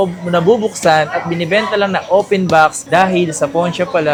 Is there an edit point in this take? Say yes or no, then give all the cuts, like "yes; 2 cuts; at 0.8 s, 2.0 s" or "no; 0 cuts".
no; 0 cuts